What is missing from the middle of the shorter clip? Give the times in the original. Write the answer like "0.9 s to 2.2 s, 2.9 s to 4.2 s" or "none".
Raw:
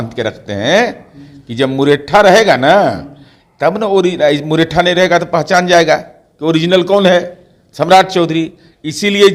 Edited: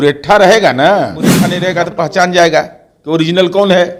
3.3 s to 4.8 s